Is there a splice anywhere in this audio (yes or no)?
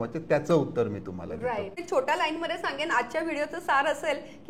yes